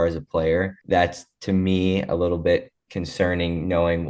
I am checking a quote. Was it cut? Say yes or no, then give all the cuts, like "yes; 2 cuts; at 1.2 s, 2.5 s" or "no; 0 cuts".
no; 0 cuts